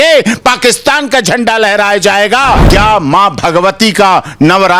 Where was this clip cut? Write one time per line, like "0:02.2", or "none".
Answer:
0:02.6